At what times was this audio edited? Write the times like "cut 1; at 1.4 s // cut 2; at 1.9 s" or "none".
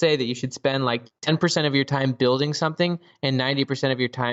none